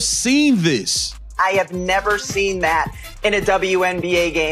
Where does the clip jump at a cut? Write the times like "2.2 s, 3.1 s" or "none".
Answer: 1.3 s